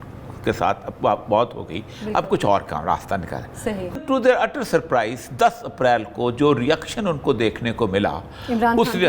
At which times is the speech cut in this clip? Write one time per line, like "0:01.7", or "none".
0:03.9